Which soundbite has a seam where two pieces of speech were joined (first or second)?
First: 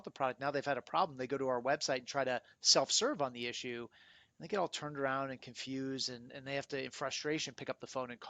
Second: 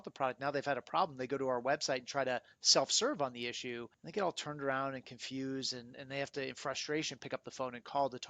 second